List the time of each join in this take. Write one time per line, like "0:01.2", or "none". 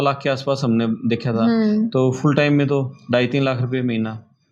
none